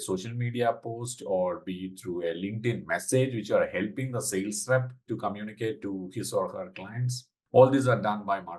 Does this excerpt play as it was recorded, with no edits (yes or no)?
yes